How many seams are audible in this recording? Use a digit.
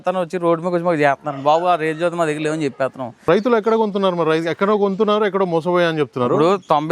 1